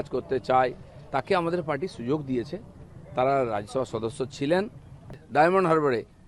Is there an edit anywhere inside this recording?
yes; 1 cut; at 5.2 s

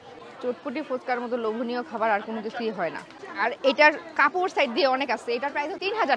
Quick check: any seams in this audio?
yes; 1 cut; at 3.2 s

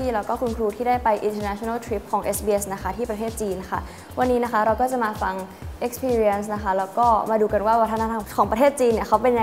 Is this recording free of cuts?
no; 1 cut; at 8.2 s

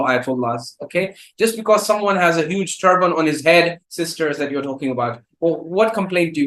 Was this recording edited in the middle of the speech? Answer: yes; 1 cut; at 3.8 s

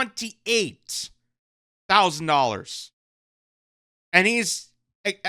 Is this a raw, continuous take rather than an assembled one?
yes; 0 cuts

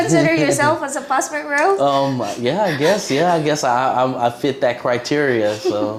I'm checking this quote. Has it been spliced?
no; 0 cuts

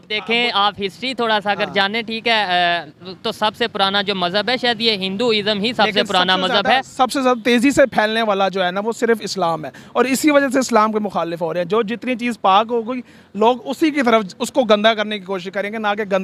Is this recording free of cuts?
yes; 0 cuts

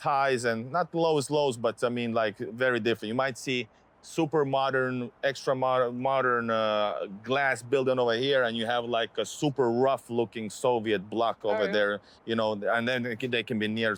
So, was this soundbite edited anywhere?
no; 0 cuts

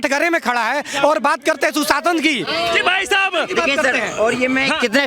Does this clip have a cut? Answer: no; 0 cuts

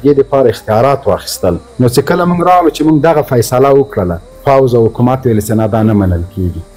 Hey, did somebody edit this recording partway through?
yes; 2 cuts; at 1.7 s, 4.3 s

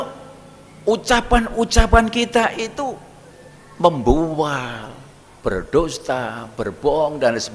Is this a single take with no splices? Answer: yes; 0 cuts

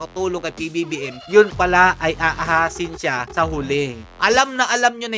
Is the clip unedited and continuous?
no; 1 cut; at 4.0 s

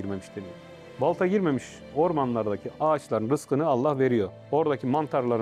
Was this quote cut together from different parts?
no; 0 cuts

